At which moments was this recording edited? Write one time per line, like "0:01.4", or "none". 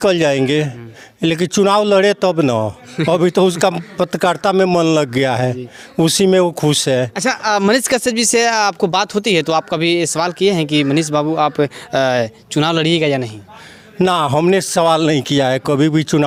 none